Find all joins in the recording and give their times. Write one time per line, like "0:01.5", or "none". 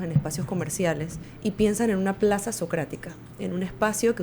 0:01.2

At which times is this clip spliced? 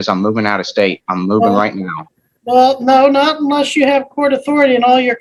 none

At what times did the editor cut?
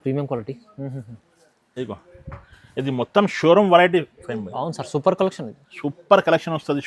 none

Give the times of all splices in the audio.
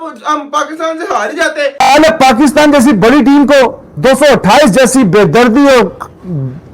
0:01.8

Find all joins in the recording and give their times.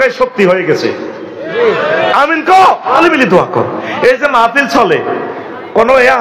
0:03.0

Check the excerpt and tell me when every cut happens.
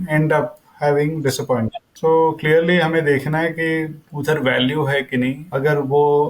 0:01.8
0:04.0
0:05.5

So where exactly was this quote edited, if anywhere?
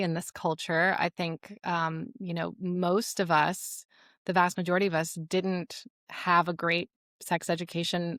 none

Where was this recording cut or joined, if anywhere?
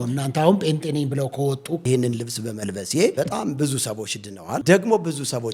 0:01.8
0:03.1
0:04.6

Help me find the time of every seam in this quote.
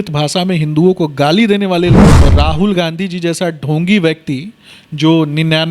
0:02.2

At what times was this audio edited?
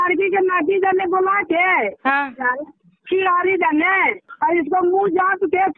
0:04.2

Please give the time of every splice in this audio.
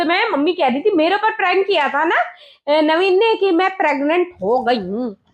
none

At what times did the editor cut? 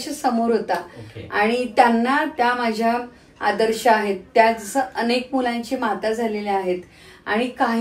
none

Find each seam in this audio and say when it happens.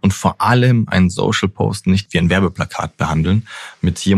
0:02.1

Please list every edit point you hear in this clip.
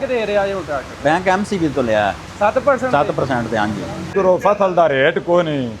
0:04.1

